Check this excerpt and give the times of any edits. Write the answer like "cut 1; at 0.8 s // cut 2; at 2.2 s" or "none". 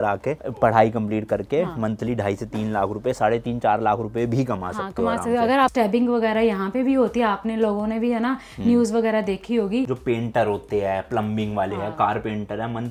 cut 1; at 5.7 s // cut 2; at 9.9 s

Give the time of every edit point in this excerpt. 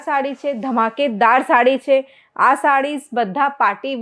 none

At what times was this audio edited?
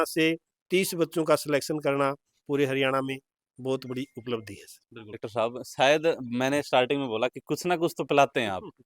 cut 1; at 5.2 s

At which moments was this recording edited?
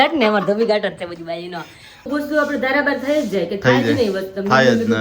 cut 1; at 2.1 s

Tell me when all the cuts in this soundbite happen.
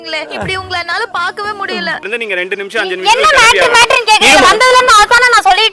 cut 1; at 2.1 s

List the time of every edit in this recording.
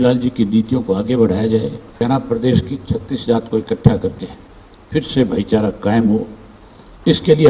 cut 1; at 2.0 s

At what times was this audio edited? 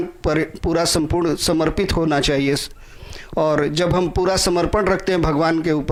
none

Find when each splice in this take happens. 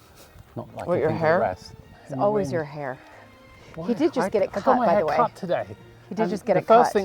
cut 1; at 2.0 s

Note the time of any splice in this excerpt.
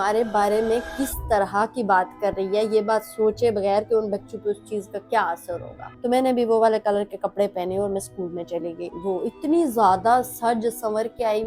cut 1; at 5.8 s // cut 2; at 8.9 s

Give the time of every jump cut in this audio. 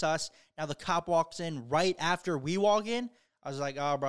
none

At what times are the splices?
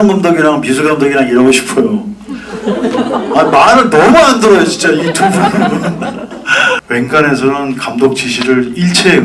cut 1; at 6.8 s

